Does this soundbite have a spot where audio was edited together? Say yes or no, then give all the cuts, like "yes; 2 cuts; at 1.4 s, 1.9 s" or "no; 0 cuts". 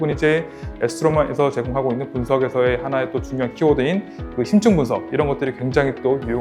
no; 0 cuts